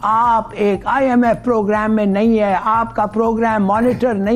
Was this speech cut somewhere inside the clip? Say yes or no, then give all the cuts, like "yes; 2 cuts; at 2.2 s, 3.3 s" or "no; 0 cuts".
no; 0 cuts